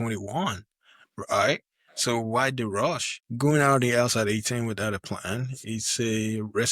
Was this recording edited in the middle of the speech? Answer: yes; 1 cut; at 3.1 s

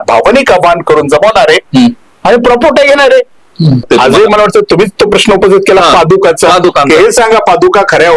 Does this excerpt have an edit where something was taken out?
yes; 1 cut; at 3.8 s

